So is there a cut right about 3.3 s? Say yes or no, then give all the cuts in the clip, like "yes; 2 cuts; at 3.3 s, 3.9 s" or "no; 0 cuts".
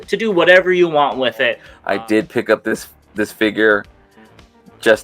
no; 1 cut; at 1.7 s